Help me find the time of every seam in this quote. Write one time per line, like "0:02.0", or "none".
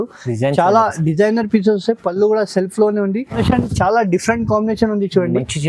0:03.4